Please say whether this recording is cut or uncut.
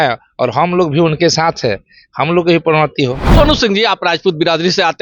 cut